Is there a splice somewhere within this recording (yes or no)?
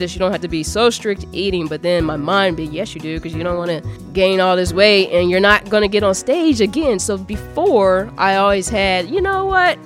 yes